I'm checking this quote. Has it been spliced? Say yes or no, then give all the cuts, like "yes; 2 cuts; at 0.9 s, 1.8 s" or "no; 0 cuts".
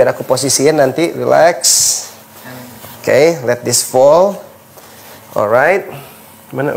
no; 0 cuts